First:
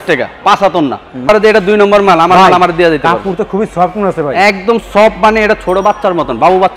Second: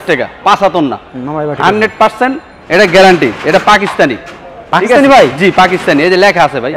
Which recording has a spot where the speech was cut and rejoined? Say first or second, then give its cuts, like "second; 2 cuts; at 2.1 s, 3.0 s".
first; 1 cut; at 1.3 s